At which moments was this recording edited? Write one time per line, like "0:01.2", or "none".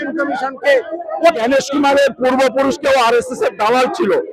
0:01.4